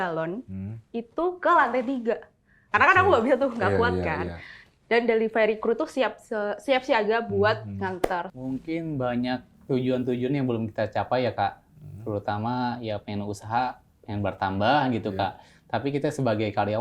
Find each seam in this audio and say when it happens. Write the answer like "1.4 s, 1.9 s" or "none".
8.3 s